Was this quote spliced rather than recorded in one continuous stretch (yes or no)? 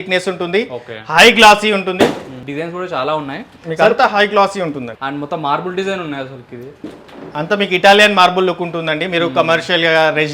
yes